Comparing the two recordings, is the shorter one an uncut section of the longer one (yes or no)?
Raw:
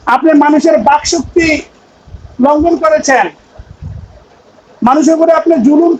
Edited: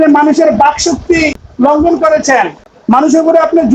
no